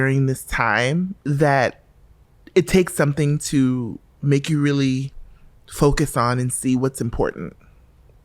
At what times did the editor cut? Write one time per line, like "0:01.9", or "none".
0:01.2